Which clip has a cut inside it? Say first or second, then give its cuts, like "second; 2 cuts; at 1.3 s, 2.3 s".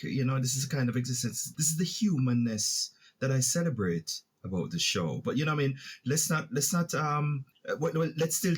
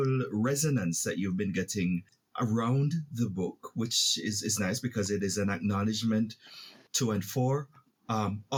first; 2 cuts; at 1.4 s, 7.5 s